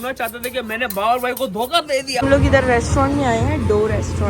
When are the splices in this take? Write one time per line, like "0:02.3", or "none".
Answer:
0:02.2